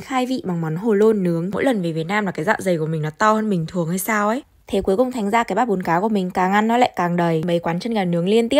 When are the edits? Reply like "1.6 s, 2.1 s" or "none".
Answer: 1.5 s, 4.5 s, 7.4 s